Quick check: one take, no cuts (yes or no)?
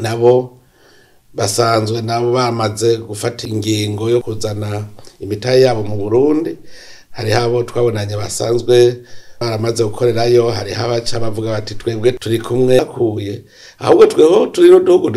no